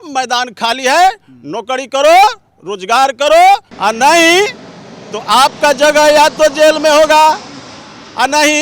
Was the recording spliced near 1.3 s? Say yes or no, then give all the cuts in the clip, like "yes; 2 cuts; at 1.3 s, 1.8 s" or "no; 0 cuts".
no; 1 cut; at 3.7 s